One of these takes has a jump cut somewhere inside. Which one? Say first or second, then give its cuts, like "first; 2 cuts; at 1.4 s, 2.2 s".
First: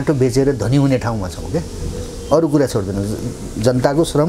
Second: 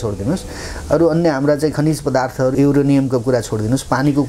second; 1 cut; at 2.5 s